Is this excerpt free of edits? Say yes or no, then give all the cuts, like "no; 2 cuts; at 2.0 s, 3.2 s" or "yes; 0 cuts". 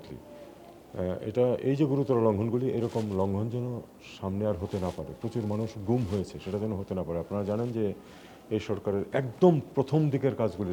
yes; 0 cuts